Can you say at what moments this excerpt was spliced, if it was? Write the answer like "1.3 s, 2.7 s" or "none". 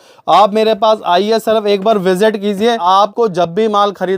2.8 s